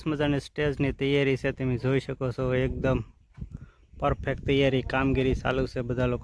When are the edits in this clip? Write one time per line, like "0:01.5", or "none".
none